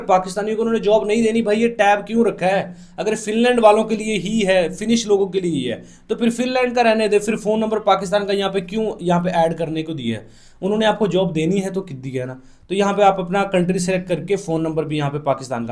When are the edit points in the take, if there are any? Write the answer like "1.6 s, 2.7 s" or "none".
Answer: none